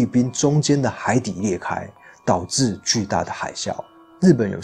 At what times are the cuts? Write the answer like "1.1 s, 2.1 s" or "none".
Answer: none